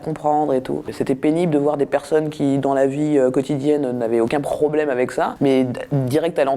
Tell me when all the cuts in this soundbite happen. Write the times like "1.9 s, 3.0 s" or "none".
0.9 s, 5.3 s